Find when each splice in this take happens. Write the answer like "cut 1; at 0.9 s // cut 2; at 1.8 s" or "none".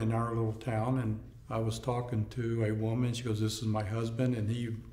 cut 1; at 1.3 s